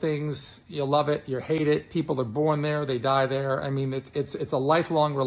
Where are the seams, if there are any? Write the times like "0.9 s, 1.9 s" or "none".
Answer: none